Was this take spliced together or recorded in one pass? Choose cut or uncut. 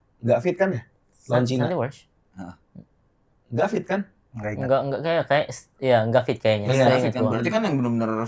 uncut